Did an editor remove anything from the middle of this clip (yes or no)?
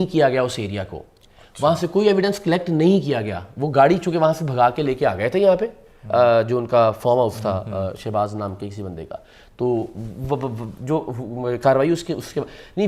no